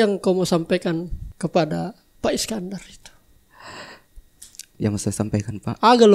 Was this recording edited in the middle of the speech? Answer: yes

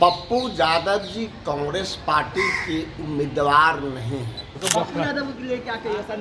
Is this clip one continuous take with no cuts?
no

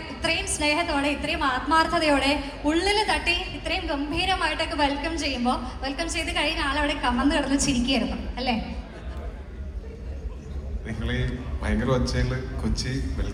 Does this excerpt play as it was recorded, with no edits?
yes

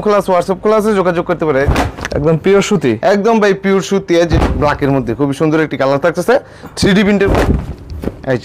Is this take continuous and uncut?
no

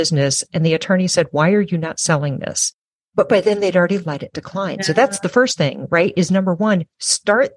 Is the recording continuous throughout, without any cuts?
no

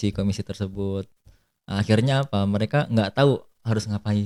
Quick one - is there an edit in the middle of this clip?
no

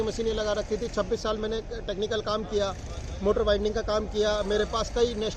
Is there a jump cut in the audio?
no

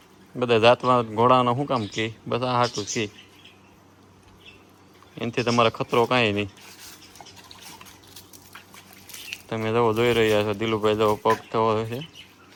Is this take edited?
no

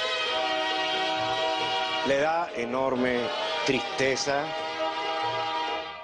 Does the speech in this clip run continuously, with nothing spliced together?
no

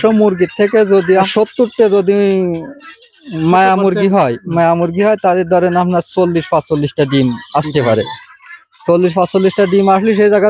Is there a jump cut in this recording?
yes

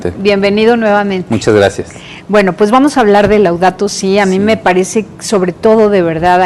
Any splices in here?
yes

